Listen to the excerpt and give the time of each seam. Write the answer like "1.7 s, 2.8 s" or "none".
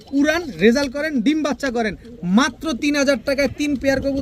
none